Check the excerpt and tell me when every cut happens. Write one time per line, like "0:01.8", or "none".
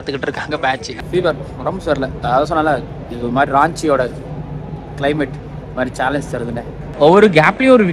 0:00.9
0:06.8